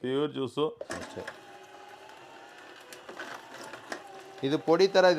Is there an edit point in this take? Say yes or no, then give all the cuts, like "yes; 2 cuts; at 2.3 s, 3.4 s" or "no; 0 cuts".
yes; 1 cut; at 0.9 s